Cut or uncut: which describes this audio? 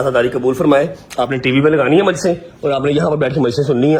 uncut